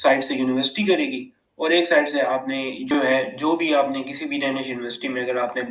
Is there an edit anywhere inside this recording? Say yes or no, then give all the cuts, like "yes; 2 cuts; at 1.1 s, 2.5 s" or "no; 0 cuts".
yes; 1 cut; at 2.9 s